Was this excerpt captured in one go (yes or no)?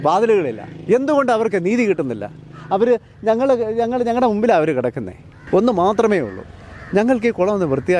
no